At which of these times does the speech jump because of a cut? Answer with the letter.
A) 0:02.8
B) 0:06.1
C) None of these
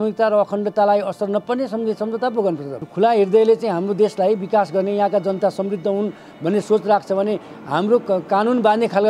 A